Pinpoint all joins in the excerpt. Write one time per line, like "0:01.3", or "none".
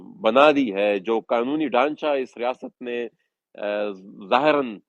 none